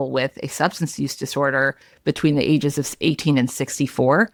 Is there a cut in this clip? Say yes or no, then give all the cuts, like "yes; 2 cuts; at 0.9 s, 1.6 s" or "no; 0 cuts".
no; 0 cuts